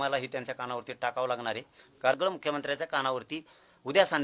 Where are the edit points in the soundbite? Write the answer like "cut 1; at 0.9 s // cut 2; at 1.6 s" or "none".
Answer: cut 1; at 2.1 s